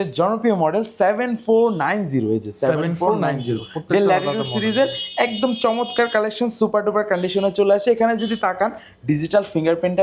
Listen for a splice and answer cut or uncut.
uncut